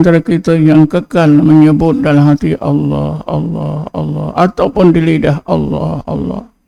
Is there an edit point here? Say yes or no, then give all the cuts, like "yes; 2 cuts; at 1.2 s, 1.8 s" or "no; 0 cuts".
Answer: no; 0 cuts